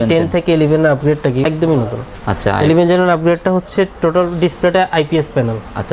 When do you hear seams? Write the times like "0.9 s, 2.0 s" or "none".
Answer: 1.4 s